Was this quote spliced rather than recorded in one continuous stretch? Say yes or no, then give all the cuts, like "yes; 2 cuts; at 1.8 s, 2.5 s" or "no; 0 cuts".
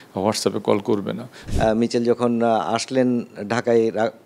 yes; 1 cut; at 1.4 s